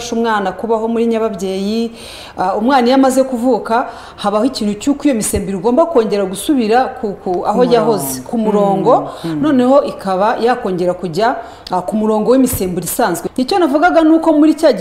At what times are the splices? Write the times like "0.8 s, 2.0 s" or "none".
13.2 s